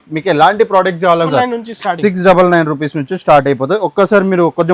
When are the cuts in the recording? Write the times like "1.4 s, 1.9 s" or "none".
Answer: 1.3 s

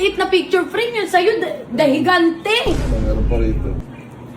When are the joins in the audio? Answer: none

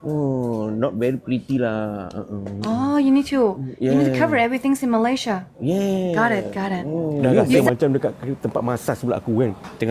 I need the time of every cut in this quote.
7.6 s

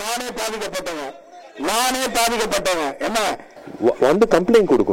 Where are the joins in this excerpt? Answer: 3.5 s

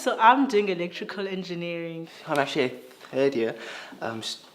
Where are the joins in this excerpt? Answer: 3.6 s

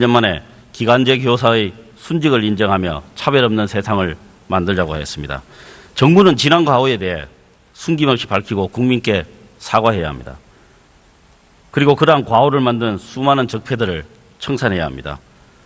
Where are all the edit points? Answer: none

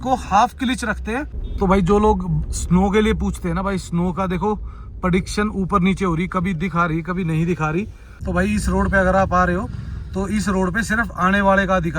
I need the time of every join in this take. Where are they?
1.4 s, 8.0 s

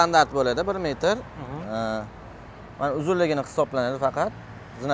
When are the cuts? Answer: none

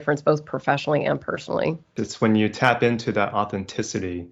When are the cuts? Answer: 2.0 s

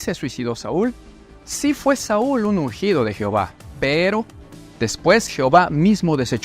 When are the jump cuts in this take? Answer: 1.1 s

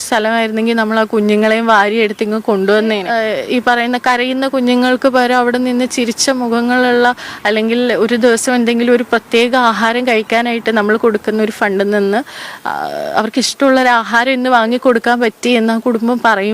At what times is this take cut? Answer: 3.0 s

